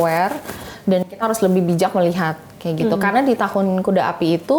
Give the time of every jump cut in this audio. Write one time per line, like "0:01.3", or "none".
none